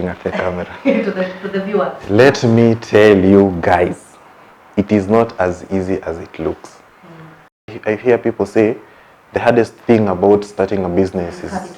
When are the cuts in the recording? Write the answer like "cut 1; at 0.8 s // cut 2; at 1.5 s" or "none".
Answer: cut 1; at 7.8 s